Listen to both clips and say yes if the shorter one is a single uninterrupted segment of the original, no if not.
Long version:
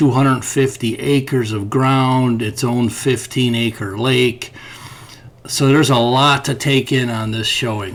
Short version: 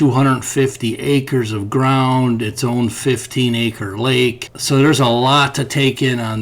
no